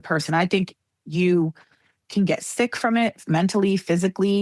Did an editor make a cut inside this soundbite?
no; 0 cuts

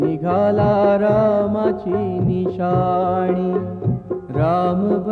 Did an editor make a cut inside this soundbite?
no; 0 cuts

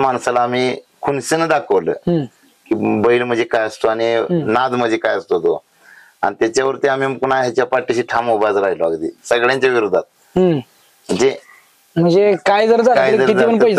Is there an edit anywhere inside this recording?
no; 0 cuts

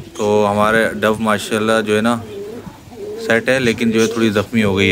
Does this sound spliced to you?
no; 0 cuts

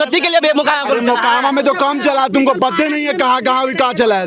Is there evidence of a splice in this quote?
no; 0 cuts

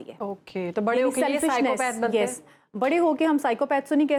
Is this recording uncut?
yes; 0 cuts

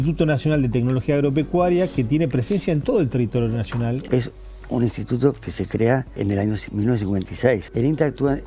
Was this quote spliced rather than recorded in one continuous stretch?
yes; 3 cuts; at 4.0 s, 6.2 s, 7.7 s

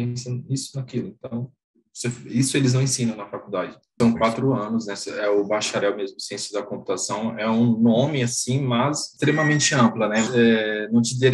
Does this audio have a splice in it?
yes; 3 cuts; at 4.0 s, 9.1 s, 10.3 s

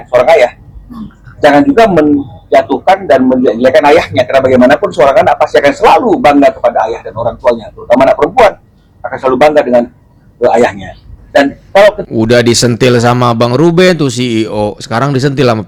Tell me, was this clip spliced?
no; 0 cuts

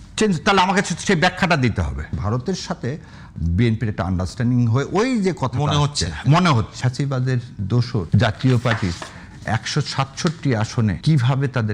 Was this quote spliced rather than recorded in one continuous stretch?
yes; 4 cuts; at 2.2 s, 6.7 s, 8.1 s, 11.0 s

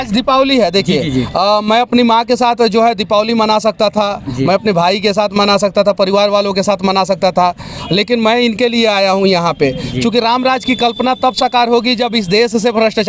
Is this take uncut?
yes; 0 cuts

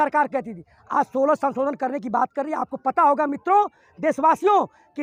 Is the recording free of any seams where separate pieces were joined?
yes; 0 cuts

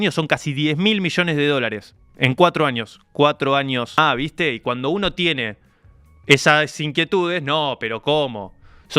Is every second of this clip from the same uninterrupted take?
no; 1 cut; at 4.0 s

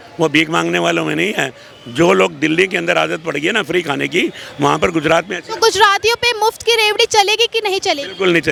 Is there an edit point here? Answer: no; 0 cuts

